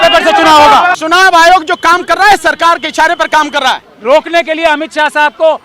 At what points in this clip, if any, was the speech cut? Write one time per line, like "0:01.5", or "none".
0:01.0
0:03.9